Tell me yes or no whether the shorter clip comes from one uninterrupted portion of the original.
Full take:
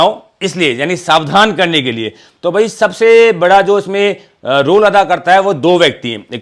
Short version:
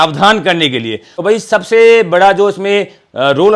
no